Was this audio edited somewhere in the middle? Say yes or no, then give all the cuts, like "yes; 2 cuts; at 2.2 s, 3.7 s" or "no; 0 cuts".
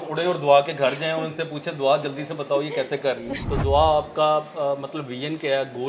no; 0 cuts